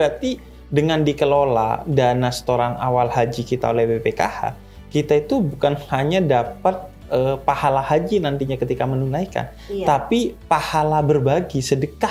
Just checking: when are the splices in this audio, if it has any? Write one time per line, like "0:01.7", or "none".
none